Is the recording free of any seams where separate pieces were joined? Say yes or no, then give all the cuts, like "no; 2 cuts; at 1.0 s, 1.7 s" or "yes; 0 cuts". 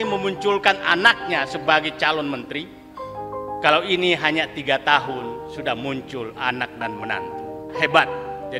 no; 1 cut; at 7.2 s